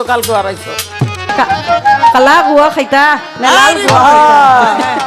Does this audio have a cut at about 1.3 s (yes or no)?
yes